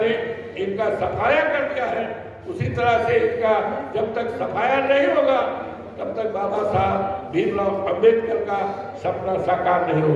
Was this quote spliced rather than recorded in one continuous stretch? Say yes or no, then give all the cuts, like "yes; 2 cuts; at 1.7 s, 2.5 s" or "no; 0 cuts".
no; 0 cuts